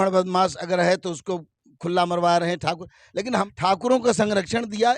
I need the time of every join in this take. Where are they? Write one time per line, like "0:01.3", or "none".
0:03.5